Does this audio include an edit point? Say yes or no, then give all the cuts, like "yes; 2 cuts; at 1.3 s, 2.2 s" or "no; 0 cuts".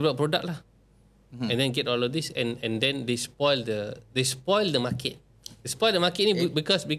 no; 0 cuts